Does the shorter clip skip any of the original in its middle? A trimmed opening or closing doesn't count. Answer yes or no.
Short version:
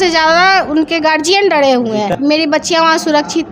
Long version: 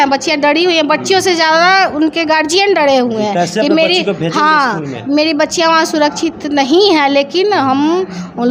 yes